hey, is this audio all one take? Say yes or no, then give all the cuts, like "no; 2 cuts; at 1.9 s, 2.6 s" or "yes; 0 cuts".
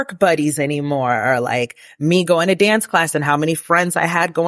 yes; 0 cuts